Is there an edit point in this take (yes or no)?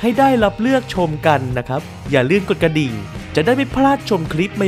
no